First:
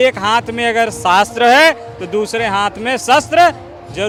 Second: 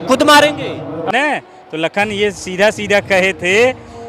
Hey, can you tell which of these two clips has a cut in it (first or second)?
second